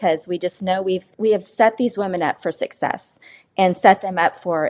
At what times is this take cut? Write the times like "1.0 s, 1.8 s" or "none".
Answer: 1.1 s